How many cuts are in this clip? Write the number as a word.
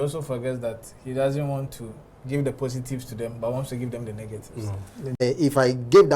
one